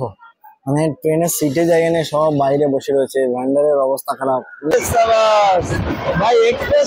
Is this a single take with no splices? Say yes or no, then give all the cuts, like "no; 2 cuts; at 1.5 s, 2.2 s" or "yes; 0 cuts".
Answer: no; 1 cut; at 4.7 s